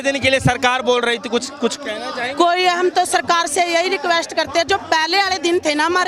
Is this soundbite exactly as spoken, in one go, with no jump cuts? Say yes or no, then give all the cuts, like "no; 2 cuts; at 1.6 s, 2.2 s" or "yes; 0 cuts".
yes; 0 cuts